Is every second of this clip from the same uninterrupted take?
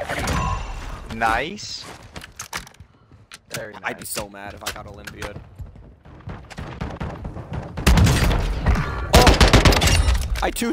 no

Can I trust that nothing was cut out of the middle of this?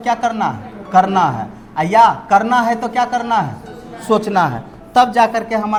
yes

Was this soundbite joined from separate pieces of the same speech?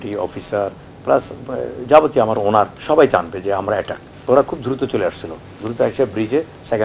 yes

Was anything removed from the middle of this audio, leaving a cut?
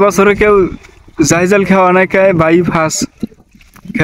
no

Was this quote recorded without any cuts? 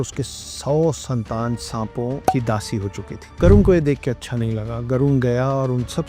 no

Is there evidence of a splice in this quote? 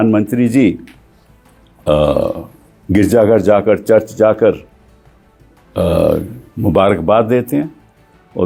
no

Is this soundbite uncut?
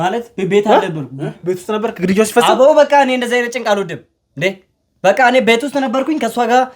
yes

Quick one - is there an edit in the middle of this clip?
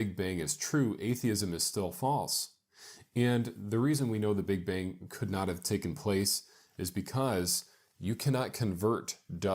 yes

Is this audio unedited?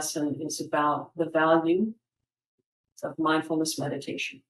yes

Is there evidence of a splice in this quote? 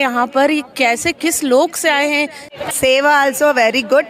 yes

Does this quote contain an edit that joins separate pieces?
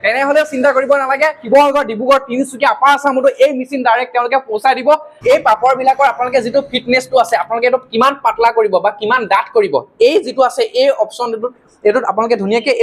yes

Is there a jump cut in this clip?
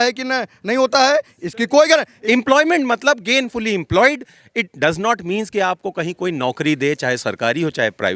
yes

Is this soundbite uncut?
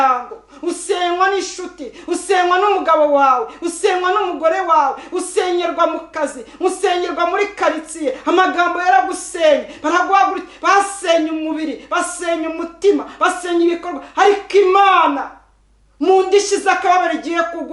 yes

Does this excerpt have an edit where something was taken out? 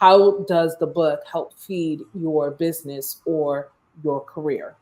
no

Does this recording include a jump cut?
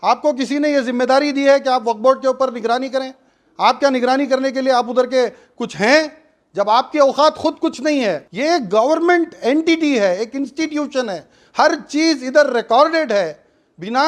yes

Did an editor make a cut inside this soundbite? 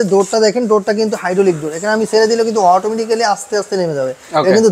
no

